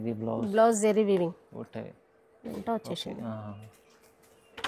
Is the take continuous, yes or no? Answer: yes